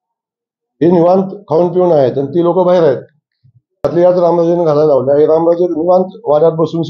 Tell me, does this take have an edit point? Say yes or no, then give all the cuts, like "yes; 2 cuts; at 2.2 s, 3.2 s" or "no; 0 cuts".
yes; 1 cut; at 3.9 s